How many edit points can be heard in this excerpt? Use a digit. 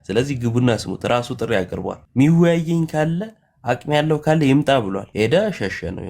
2